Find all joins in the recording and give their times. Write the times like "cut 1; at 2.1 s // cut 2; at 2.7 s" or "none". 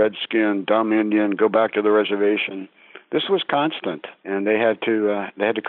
cut 1; at 4.1 s